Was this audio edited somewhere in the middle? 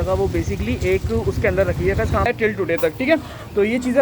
yes; 1 cut; at 2.3 s

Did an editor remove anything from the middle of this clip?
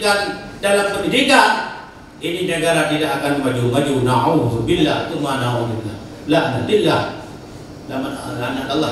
no; 0 cuts

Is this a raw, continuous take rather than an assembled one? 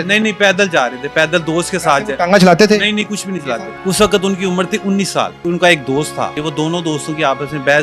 no; 3 cuts; at 3.7 s, 5.4 s, 6.4 s

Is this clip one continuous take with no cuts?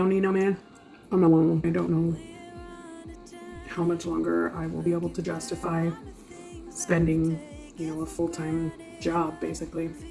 no; 1 cut; at 1.6 s

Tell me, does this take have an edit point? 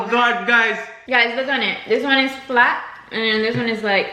yes; 1 cut; at 1.0 s

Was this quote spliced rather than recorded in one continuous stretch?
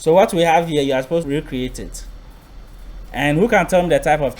yes; 1 cut; at 1.2 s

